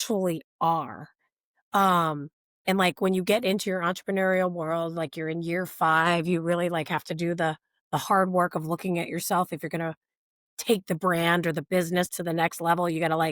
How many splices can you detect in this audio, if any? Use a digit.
0